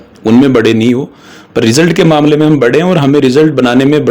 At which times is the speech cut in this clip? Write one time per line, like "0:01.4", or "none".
none